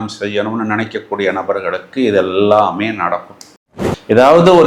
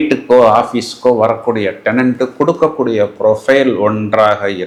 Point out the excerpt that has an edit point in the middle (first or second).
first